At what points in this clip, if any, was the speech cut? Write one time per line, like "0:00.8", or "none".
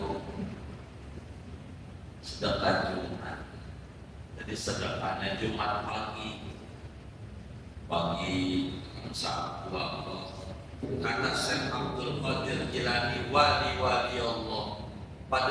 0:10.7